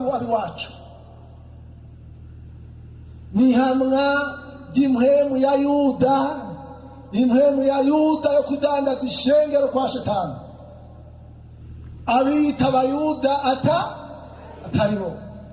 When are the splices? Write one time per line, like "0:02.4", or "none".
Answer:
0:11.6